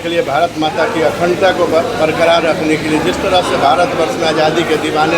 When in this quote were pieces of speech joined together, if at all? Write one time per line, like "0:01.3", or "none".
none